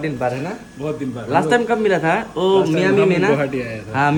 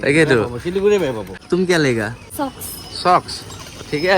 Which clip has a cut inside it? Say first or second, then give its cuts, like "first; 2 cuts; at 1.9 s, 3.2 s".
second; 2 cuts; at 1.3 s, 2.2 s